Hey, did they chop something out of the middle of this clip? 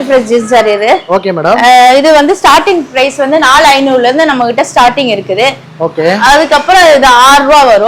no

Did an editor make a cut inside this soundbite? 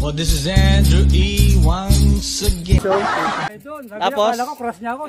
yes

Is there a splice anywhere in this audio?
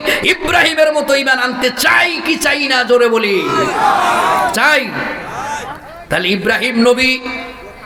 no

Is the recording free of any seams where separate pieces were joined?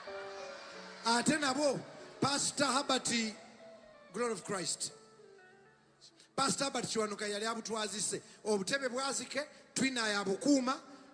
no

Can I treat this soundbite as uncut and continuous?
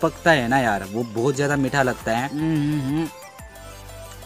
no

